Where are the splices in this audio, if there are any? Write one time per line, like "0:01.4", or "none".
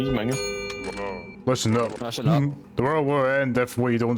0:01.3